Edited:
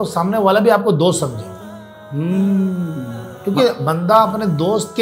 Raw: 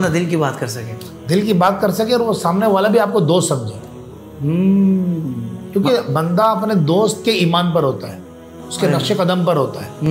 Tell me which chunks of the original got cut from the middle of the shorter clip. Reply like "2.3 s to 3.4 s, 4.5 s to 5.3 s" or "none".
none